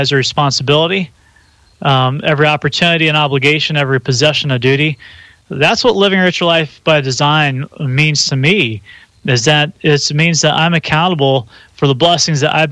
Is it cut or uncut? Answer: uncut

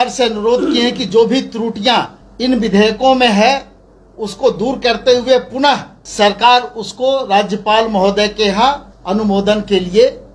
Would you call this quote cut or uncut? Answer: cut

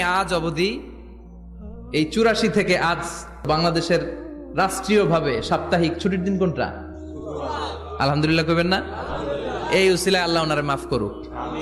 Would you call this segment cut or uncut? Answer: cut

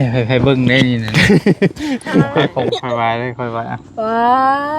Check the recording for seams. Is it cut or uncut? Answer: cut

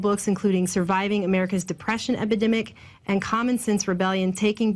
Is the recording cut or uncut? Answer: cut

